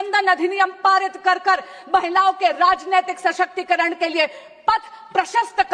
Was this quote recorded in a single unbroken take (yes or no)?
yes